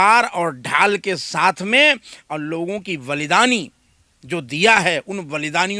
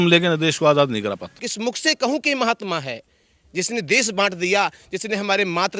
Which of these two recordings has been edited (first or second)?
second